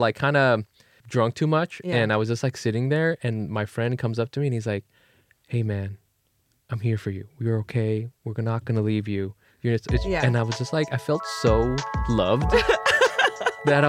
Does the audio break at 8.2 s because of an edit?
no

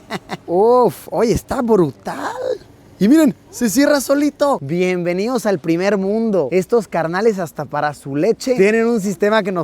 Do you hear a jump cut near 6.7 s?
no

